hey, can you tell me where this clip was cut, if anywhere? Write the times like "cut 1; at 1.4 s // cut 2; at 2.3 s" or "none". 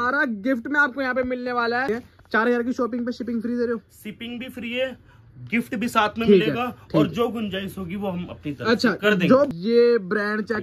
cut 1; at 1.9 s // cut 2; at 9.5 s